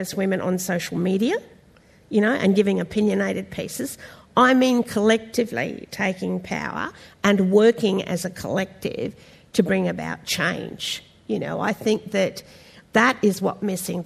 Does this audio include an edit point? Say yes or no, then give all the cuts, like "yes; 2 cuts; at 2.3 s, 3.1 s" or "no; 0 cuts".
yes; 1 cut; at 12.9 s